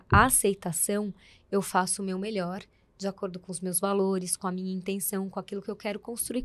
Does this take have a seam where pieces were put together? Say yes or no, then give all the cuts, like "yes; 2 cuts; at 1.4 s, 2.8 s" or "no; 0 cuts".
no; 0 cuts